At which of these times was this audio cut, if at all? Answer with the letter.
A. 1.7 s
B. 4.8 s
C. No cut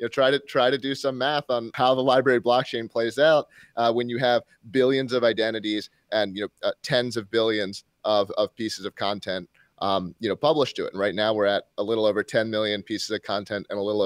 A